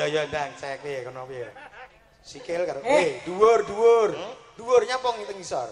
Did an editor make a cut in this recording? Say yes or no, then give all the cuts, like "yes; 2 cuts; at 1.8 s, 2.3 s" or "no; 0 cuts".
no; 0 cuts